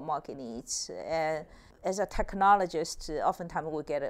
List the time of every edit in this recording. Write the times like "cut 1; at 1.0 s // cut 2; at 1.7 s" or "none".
cut 1; at 1.7 s